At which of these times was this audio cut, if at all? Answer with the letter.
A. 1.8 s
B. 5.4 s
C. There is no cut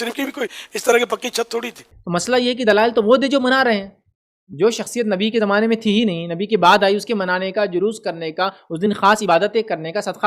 A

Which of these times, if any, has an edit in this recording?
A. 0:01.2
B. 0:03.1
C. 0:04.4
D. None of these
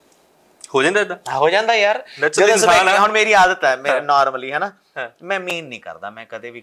D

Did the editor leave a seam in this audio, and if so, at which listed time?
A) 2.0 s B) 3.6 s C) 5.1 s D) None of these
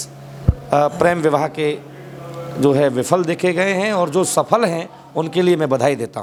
D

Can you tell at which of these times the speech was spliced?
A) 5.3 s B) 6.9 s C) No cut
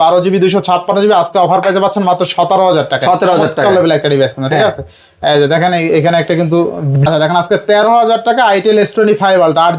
B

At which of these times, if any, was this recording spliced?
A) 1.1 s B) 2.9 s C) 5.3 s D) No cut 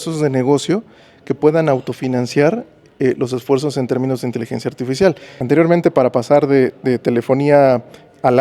C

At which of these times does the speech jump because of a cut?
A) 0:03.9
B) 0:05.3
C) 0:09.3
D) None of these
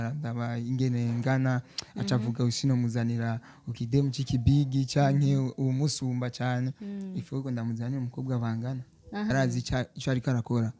C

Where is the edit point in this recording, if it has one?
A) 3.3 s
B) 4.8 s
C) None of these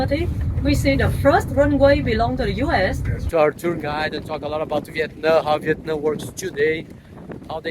A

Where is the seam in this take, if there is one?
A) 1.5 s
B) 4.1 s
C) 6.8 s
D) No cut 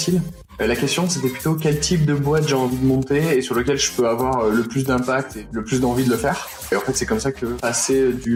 D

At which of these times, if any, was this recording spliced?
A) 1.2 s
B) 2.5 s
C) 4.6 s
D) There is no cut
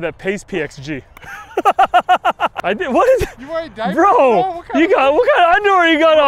B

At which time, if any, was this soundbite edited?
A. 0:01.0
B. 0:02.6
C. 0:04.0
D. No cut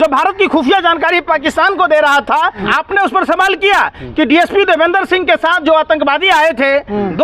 B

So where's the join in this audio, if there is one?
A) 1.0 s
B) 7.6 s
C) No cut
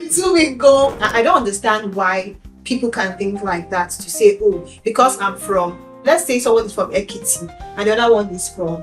A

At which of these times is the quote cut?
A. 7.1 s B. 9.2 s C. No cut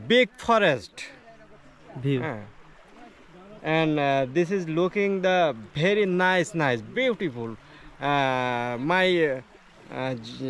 C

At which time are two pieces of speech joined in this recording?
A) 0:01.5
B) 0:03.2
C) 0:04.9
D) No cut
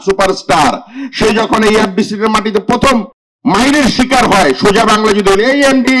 B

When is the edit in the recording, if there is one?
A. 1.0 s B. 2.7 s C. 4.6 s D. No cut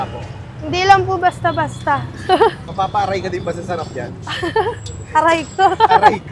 B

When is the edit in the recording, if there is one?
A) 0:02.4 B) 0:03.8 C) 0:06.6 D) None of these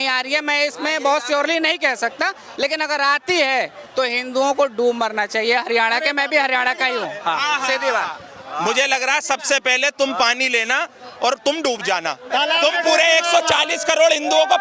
A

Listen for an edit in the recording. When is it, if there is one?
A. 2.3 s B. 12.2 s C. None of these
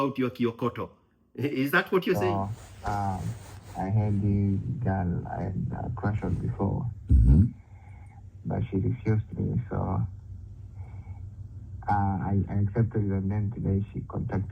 A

